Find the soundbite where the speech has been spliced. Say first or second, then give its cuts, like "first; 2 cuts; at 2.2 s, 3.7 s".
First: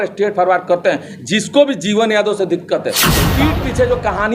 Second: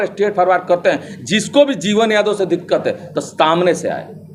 first; 1 cut; at 3.3 s